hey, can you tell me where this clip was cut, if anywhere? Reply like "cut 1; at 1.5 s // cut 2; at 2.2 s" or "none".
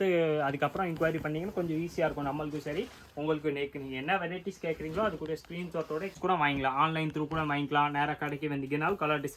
cut 1; at 6.1 s